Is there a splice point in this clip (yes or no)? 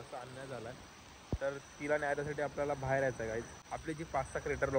yes